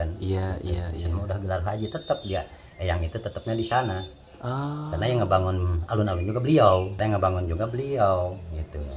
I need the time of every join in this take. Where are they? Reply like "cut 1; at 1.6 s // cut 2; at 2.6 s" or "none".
none